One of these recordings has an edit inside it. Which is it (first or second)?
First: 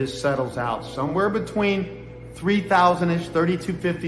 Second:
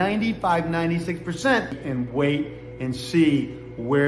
second